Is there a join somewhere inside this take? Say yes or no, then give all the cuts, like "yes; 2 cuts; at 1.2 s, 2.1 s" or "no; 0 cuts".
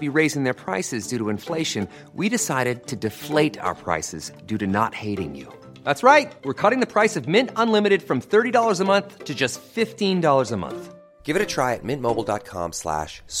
no; 0 cuts